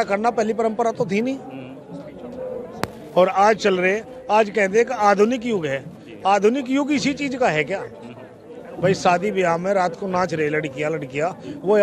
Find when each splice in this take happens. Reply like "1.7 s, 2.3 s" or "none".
none